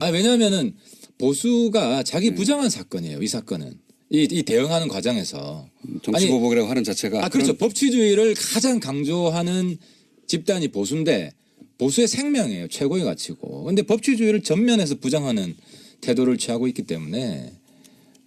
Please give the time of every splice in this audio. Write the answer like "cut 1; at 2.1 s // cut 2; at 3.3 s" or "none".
cut 1; at 6.4 s